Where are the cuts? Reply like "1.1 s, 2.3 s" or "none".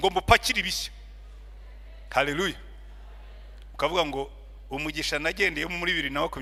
none